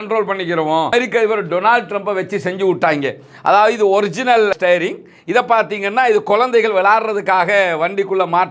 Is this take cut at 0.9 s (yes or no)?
yes